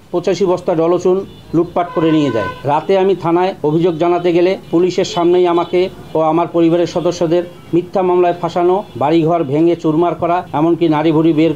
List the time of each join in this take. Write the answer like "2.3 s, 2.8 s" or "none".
2.5 s, 3.6 s, 4.6 s, 8.9 s, 10.5 s